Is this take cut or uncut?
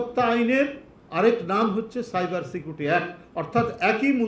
uncut